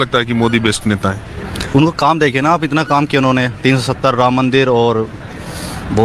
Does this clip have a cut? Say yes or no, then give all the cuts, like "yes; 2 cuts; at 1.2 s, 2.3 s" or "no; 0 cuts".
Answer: no; 0 cuts